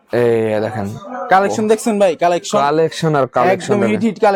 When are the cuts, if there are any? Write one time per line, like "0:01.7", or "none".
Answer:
none